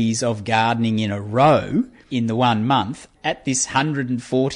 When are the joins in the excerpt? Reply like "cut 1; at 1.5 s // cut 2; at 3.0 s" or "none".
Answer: cut 1; at 2.0 s // cut 2; at 3.1 s